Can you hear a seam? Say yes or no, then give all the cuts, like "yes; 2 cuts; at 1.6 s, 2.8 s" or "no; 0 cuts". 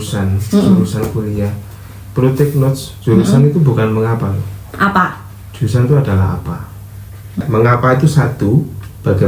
yes; 1 cut; at 7.4 s